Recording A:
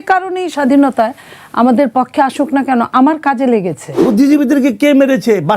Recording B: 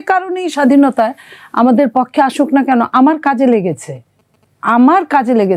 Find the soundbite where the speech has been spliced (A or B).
A